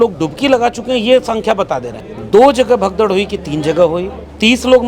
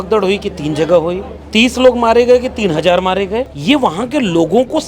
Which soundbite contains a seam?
second; 1 cut; at 3.5 s

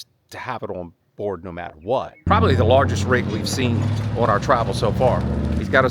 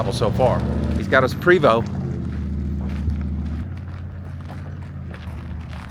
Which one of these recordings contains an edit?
first; 1 cut; at 2.2 s

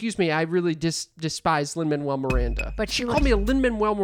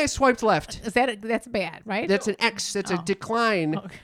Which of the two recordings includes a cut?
second; 1 cut; at 2.0 s

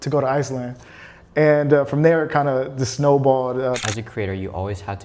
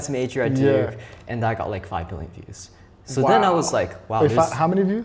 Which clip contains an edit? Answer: first; 1 cut; at 3.8 s

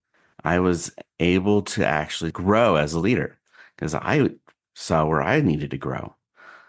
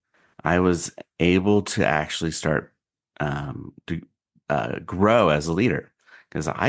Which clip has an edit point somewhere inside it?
first; 1 cut; at 2.3 s

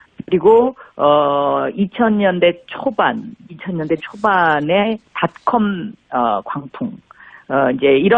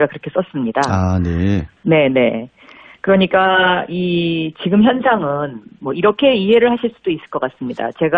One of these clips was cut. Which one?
first; 1 cut; at 5.7 s

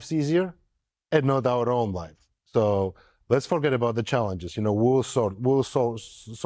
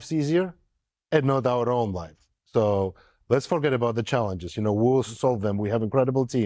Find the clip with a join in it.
second; 1 cut; at 5.1 s

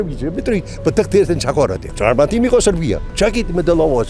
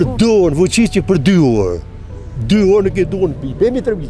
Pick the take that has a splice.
first; 2 cuts; at 1.8 s, 3.1 s

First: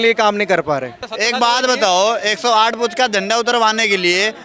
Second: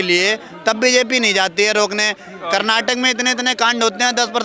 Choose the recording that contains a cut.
first; 1 cut; at 1.0 s

